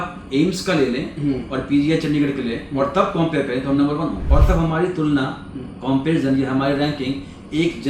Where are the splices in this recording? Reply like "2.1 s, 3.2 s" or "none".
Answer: 4.2 s